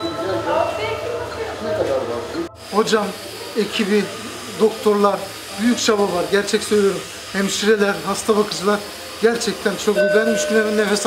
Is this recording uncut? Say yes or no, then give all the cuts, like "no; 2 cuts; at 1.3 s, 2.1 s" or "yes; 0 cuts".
yes; 0 cuts